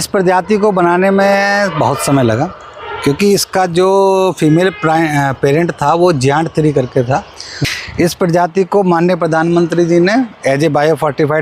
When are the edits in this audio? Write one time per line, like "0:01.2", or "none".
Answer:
0:07.5